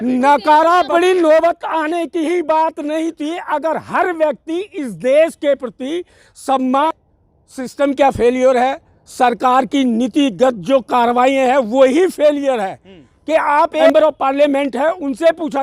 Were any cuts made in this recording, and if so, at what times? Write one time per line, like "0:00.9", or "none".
0:01.3
0:07.3
0:13.9